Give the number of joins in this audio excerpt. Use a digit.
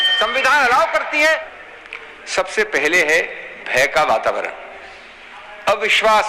1